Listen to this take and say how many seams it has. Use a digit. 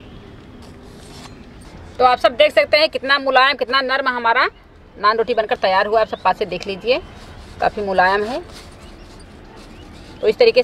1